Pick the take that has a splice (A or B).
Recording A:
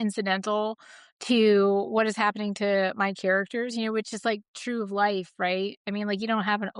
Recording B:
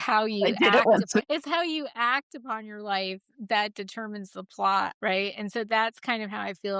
B